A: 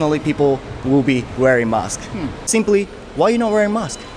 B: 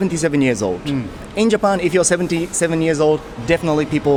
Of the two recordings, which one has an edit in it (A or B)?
A